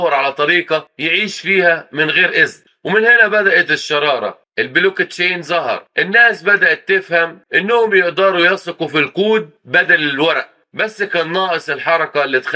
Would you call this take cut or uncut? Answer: uncut